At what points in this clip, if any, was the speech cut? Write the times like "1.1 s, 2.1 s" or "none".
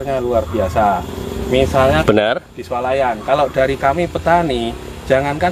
2.0 s